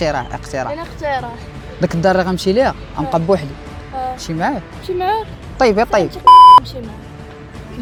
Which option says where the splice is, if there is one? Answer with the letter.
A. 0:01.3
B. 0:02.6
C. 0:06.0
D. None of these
D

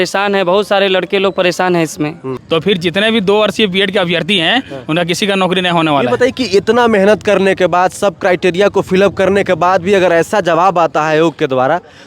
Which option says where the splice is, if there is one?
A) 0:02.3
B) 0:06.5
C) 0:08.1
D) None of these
A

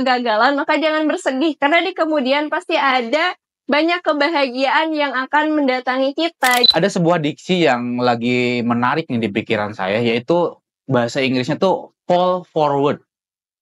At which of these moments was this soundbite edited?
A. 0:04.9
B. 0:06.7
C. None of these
B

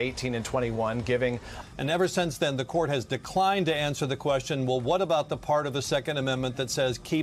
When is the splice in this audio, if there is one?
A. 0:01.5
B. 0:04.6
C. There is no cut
A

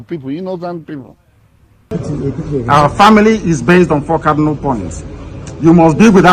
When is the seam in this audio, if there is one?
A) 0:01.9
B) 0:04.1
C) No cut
A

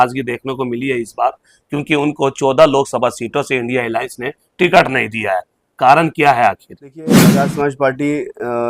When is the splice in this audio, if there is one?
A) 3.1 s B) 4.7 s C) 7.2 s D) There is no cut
C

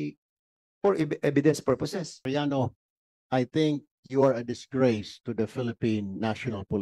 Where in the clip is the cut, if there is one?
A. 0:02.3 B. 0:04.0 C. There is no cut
A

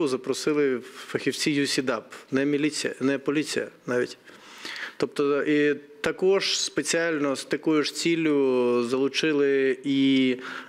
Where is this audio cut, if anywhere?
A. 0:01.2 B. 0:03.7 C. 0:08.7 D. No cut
D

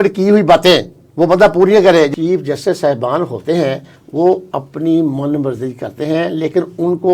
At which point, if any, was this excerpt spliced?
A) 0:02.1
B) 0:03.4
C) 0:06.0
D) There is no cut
A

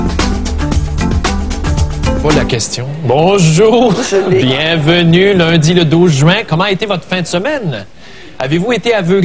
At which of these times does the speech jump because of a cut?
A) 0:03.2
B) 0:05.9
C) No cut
C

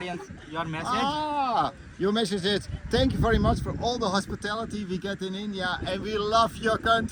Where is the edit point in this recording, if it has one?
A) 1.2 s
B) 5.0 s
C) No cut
C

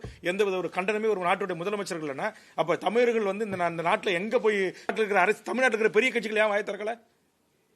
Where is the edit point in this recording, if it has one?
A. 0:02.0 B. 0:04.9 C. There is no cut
B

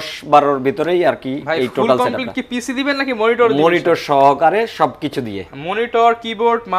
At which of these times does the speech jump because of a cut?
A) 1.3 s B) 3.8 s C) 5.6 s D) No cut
D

